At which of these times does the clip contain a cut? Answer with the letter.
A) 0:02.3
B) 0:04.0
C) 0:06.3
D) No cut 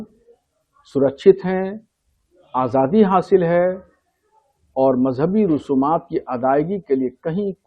D